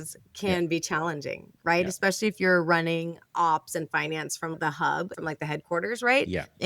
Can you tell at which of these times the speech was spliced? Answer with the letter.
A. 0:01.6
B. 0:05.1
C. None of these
B